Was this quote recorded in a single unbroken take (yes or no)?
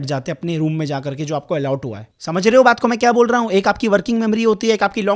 no